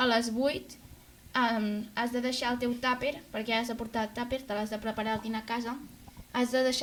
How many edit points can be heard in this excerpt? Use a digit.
0